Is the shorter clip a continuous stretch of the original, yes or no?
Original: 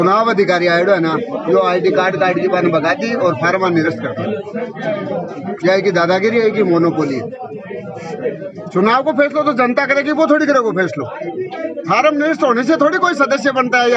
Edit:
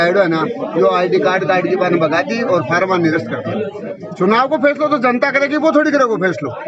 no